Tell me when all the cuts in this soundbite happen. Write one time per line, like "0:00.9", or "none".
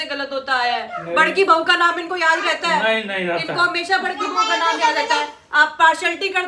none